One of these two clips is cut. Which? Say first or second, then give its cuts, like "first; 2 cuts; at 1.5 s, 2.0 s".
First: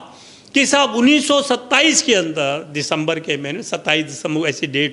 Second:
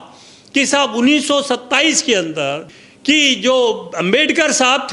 second; 1 cut; at 2.7 s